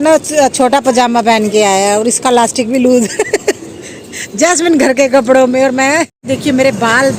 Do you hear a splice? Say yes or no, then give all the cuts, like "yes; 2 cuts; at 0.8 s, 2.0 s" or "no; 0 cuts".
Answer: no; 0 cuts